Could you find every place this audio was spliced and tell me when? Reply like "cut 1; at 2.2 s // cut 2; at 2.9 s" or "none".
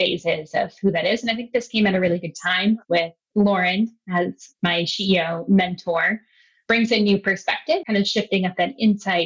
cut 1; at 7.8 s